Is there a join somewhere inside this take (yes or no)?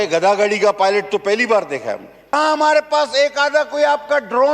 yes